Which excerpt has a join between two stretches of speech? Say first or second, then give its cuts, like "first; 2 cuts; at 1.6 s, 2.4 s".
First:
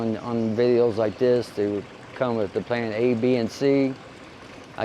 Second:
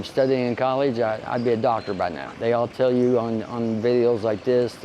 second; 1 cut; at 2.2 s